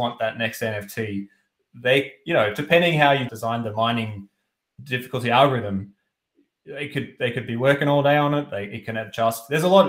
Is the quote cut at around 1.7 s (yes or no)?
no